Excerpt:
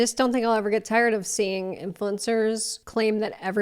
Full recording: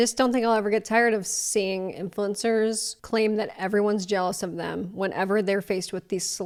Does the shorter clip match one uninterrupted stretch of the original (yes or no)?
no